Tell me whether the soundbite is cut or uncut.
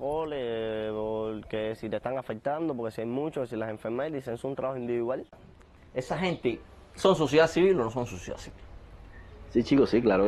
cut